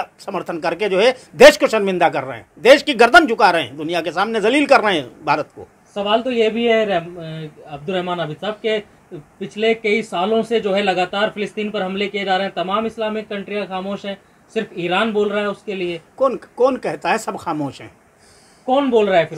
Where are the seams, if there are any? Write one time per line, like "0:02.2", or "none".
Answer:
none